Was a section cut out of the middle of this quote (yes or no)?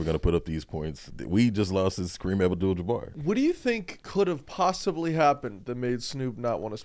yes